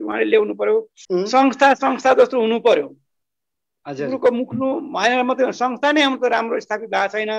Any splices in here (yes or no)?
yes